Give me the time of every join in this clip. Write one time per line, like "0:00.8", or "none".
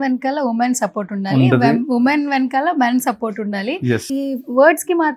none